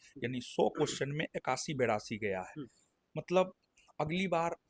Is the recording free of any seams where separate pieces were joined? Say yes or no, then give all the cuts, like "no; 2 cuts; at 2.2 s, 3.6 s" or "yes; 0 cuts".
yes; 0 cuts